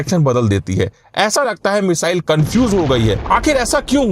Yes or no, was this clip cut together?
yes